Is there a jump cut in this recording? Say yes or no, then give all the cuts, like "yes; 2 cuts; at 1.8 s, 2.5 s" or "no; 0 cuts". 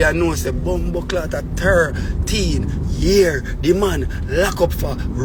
no; 0 cuts